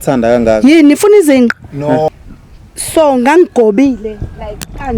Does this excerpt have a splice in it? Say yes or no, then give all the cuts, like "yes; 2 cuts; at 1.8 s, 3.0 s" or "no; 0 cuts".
yes; 1 cut; at 2.1 s